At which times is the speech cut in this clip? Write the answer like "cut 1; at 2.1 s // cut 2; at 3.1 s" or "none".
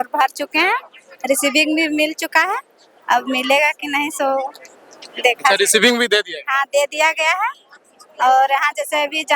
none